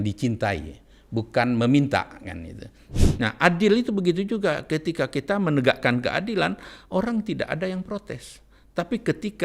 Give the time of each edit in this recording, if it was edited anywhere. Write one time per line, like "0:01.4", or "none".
0:02.9

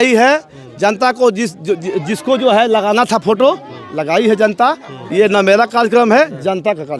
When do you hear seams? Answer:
none

